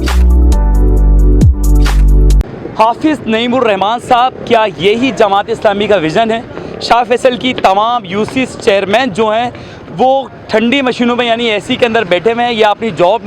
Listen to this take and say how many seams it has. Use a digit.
1